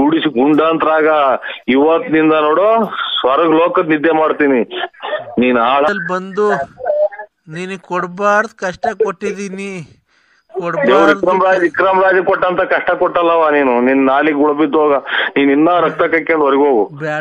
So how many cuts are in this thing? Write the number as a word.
one